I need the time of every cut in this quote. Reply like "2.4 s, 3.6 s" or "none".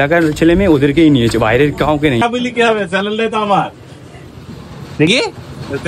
2.2 s